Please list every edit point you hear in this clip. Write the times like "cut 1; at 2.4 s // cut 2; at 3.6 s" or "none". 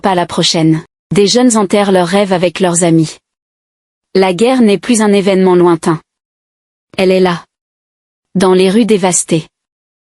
cut 1; at 0.9 s